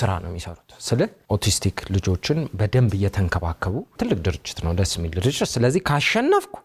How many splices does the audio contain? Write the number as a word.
two